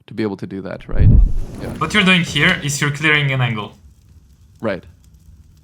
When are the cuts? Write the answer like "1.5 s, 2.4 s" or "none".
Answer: 1.1 s